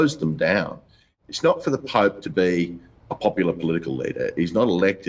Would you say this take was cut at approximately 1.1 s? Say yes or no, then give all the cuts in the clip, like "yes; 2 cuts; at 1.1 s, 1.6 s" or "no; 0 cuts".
yes; 1 cut; at 1.1 s